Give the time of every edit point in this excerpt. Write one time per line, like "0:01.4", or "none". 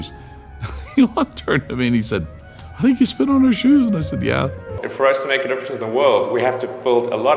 0:04.7